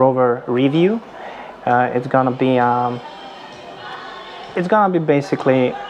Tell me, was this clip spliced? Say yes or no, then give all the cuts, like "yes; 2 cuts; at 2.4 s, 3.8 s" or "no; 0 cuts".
no; 0 cuts